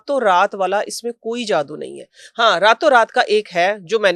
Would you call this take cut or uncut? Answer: uncut